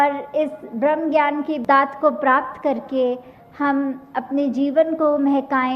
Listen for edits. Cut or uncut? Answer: cut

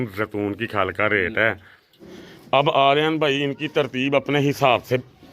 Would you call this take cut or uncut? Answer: cut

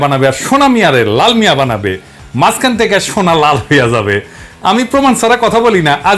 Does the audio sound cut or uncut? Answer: uncut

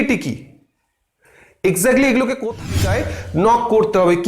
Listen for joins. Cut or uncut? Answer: cut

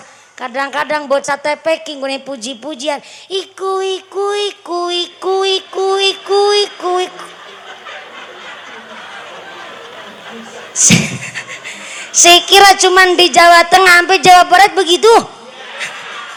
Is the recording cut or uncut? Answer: uncut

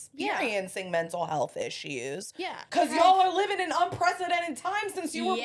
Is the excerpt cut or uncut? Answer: cut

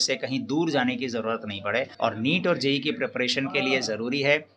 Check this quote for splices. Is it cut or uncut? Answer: cut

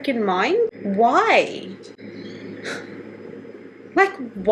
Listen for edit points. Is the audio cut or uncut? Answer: uncut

